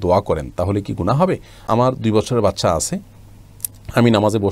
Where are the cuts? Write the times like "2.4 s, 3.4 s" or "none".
1.6 s